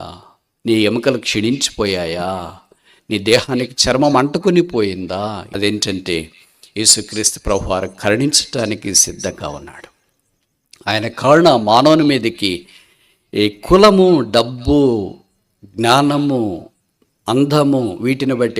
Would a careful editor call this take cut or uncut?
cut